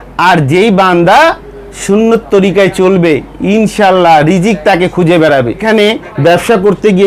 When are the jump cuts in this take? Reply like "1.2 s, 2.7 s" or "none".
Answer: 5.6 s